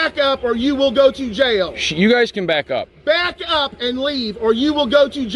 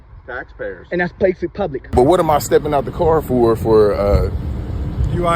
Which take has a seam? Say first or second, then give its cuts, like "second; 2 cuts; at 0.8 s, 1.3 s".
second; 1 cut; at 1.9 s